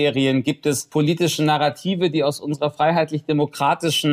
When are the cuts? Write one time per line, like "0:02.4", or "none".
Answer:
none